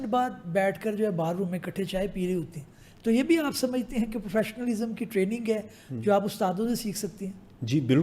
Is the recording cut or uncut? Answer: uncut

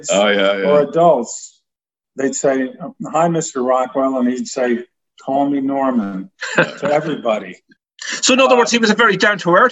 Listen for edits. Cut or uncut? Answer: uncut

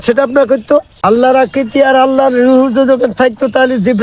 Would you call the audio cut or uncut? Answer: cut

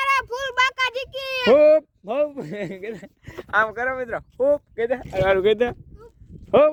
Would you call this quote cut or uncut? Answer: uncut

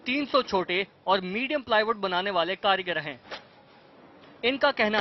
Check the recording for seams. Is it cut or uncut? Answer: uncut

